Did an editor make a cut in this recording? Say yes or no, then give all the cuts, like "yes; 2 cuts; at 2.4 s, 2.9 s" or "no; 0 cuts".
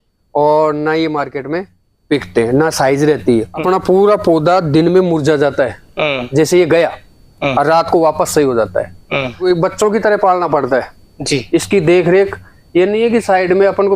yes; 2 cuts; at 3.5 s, 9.4 s